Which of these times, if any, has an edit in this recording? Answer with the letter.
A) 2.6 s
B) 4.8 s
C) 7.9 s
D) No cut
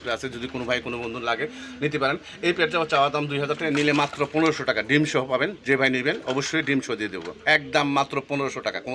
D